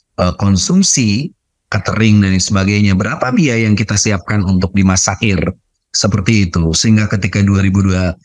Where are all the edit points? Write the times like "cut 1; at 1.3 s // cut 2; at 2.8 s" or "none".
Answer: none